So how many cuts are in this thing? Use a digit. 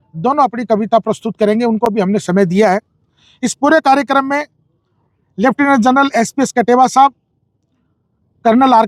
0